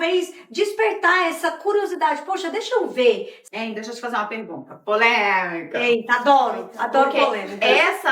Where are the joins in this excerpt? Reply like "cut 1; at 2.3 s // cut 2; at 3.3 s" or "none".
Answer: cut 1; at 3.4 s